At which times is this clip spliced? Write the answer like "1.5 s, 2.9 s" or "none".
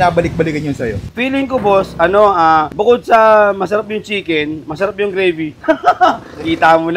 2.7 s